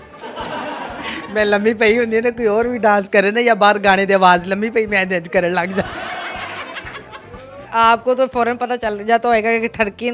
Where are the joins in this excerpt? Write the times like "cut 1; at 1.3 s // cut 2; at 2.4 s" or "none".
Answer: cut 1; at 7.6 s